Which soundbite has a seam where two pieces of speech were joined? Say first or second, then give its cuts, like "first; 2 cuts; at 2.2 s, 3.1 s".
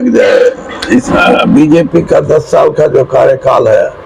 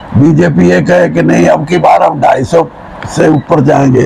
first; 1 cut; at 1.1 s